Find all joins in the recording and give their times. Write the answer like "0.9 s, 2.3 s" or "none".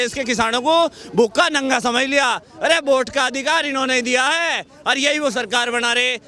none